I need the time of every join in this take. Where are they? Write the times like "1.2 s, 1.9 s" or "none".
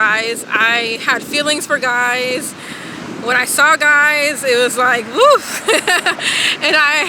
none